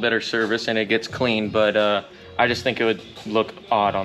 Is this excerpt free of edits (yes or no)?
yes